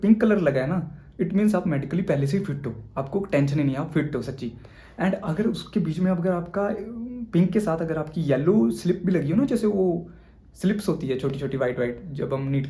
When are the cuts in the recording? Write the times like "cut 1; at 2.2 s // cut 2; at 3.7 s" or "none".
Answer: none